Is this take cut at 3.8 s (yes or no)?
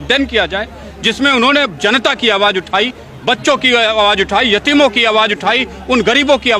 no